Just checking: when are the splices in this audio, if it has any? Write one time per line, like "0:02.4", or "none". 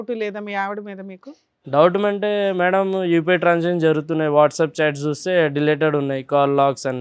none